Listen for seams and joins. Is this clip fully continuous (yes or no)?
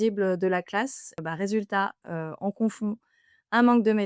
no